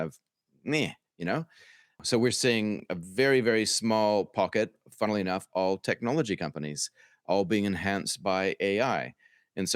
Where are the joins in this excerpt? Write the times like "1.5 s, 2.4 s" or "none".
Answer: 2.0 s